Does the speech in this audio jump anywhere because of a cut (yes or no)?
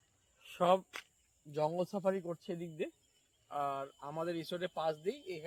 no